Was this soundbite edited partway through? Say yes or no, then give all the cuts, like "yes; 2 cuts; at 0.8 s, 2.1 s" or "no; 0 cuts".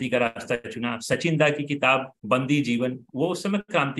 yes; 2 cuts; at 2.1 s, 3.0 s